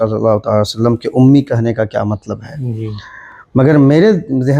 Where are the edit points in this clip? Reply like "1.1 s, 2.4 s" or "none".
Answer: none